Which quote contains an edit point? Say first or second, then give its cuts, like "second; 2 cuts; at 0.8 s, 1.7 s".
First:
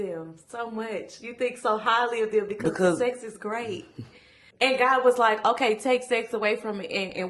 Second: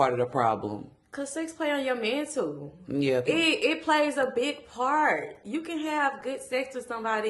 first; 1 cut; at 4.4 s